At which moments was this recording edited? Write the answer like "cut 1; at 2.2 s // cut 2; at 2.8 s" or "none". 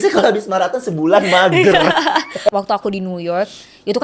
cut 1; at 2.5 s